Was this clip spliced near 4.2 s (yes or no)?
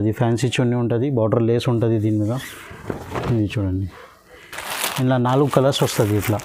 no